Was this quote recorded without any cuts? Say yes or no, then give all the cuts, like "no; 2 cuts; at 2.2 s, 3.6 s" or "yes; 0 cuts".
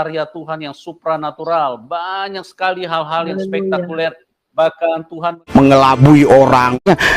no; 1 cut; at 5.5 s